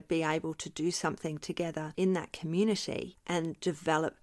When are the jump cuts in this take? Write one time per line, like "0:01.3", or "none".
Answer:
0:01.9
0:03.1